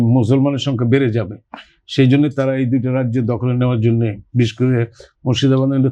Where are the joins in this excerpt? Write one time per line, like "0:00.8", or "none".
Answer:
none

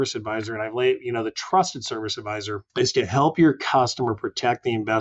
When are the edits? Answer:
0:02.6

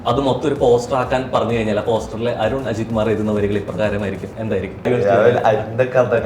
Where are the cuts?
0:04.9

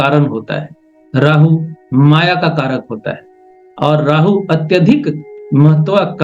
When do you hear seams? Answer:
none

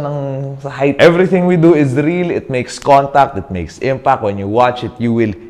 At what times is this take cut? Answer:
0:01.0

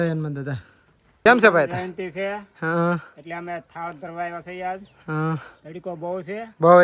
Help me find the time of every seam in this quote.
0:01.3

